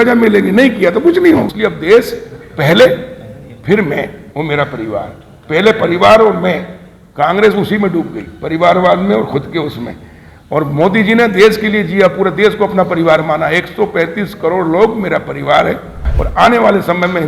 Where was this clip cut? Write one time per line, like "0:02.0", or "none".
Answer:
0:01.5
0:16.1